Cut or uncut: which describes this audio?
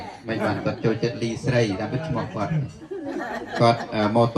uncut